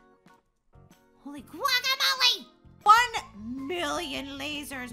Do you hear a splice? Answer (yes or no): yes